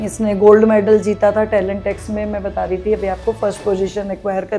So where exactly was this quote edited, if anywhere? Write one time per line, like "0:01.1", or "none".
none